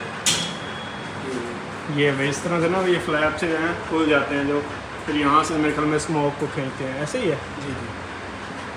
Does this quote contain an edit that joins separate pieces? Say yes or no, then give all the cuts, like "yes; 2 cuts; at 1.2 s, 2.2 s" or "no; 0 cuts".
no; 0 cuts